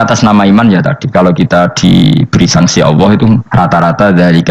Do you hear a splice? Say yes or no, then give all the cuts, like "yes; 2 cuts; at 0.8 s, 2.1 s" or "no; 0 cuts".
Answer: yes; 1 cut; at 3.5 s